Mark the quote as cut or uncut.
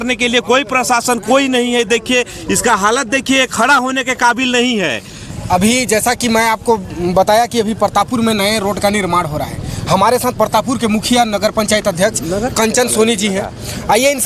uncut